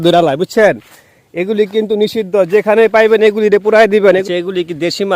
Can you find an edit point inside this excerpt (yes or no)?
yes